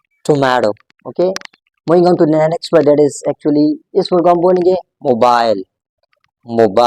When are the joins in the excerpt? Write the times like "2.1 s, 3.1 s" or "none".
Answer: none